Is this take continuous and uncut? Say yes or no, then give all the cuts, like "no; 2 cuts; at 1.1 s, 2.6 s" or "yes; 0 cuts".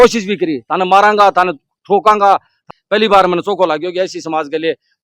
no; 1 cut; at 2.6 s